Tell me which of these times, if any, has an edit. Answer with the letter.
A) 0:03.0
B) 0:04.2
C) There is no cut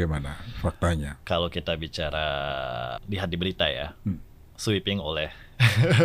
A